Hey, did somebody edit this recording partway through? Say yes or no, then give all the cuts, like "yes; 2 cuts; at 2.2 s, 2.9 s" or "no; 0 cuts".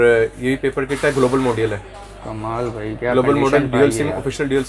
no; 0 cuts